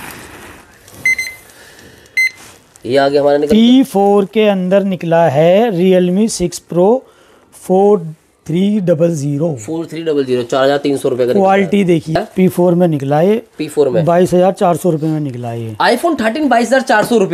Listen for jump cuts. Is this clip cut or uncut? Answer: cut